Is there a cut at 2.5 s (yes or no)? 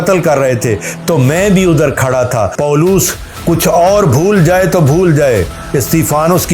yes